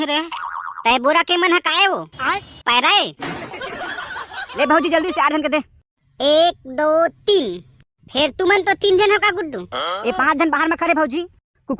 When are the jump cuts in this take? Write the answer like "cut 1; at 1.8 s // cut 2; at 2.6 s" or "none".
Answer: cut 1; at 4.5 s